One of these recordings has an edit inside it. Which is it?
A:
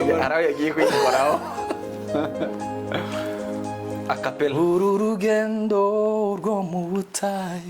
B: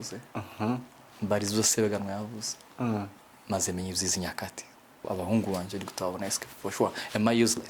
B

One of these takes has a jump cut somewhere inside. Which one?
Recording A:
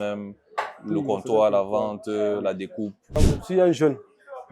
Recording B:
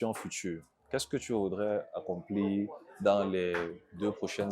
A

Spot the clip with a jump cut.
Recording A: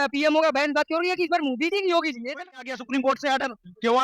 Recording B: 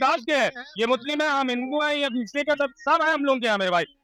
A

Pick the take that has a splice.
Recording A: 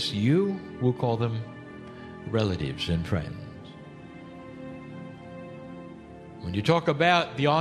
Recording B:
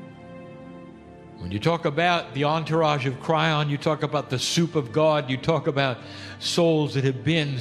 B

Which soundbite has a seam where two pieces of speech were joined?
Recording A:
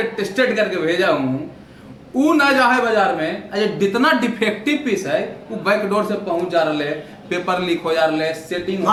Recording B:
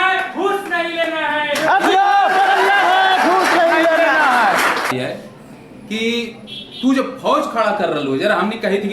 B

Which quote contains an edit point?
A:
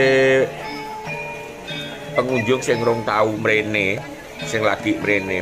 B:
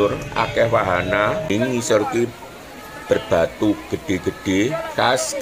B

